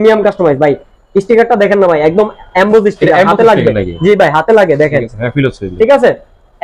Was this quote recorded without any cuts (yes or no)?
yes